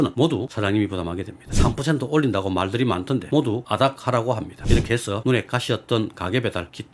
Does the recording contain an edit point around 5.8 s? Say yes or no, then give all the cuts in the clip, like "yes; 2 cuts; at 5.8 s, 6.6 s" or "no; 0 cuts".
no; 2 cuts; at 1.4 s, 4.5 s